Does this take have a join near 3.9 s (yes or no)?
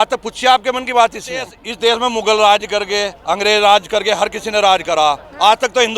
no